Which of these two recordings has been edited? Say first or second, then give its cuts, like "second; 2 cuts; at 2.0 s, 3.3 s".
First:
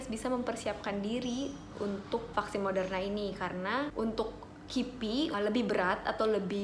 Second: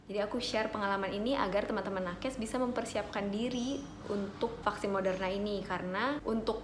first; 1 cut; at 5.3 s